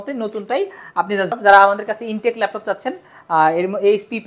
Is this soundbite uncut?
no; 1 cut; at 1.3 s

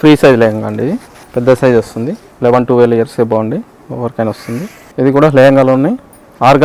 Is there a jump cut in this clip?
yes; 3 cuts; at 1.1 s, 2.2 s, 4.8 s

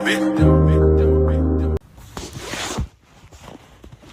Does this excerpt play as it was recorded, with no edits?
no; 1 cut; at 1.8 s

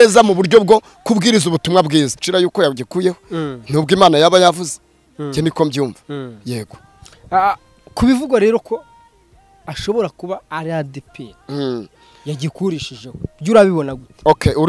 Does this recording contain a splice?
yes; 1 cut; at 2.2 s

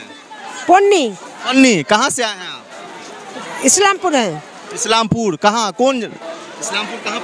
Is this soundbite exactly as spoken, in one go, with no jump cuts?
yes; 0 cuts

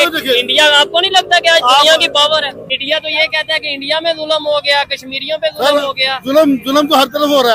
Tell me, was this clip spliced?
yes; 1 cut; at 2.6 s

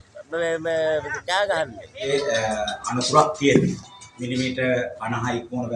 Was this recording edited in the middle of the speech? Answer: yes; 1 cut; at 2.1 s

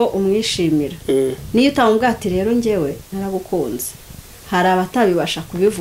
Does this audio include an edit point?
no; 0 cuts

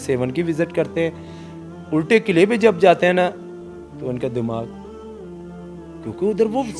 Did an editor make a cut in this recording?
no; 0 cuts

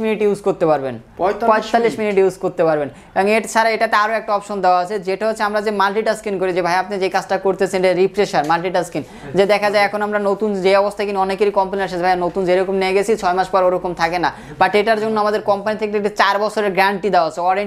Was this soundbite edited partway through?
no; 0 cuts

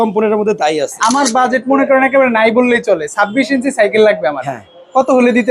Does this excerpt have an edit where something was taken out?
yes; 1 cut; at 0.9 s

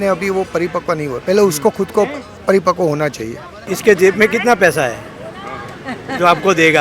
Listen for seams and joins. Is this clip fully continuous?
no; 1 cut; at 3.6 s

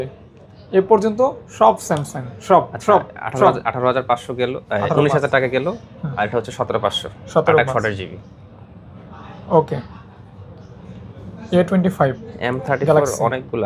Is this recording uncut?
yes; 0 cuts

